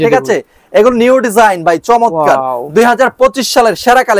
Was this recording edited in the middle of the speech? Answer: no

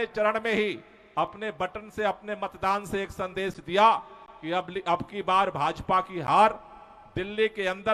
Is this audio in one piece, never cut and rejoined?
yes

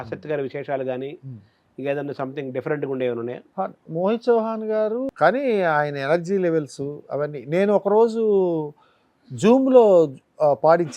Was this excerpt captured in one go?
no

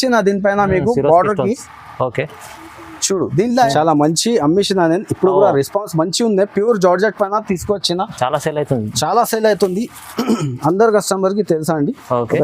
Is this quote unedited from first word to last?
no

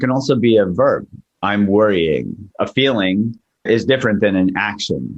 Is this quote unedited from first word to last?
no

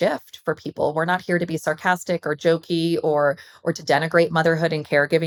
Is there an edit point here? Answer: no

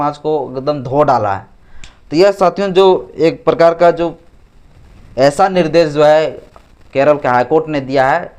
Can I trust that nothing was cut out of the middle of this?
yes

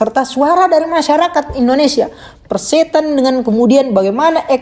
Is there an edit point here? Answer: no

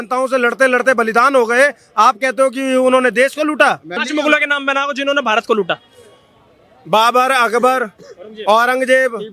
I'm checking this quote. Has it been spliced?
yes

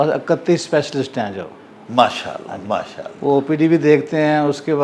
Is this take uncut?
yes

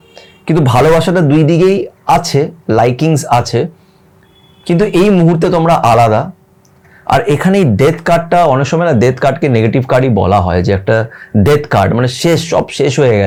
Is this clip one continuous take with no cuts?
yes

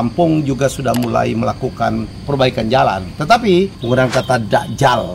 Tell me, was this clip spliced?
yes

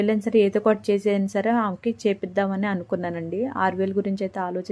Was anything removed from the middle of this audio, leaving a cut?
no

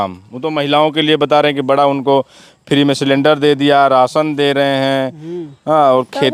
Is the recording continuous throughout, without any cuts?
yes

